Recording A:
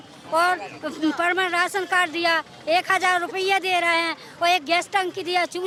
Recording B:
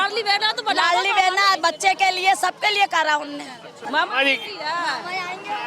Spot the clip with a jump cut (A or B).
B